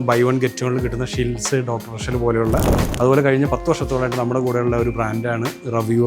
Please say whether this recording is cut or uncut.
cut